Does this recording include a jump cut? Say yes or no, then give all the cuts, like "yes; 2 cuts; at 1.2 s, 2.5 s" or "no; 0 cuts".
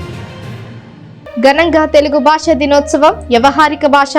yes; 1 cut; at 0.9 s